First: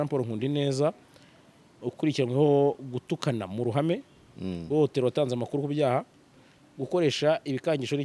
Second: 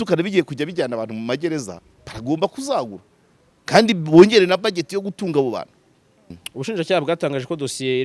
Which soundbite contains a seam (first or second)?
second